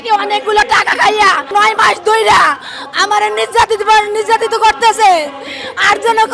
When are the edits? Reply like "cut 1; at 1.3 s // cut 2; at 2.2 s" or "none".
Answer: cut 1; at 1.5 s